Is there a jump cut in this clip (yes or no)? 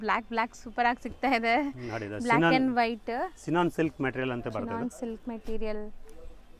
no